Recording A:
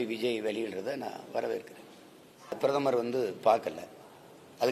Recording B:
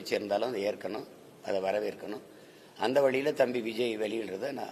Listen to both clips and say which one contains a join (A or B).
A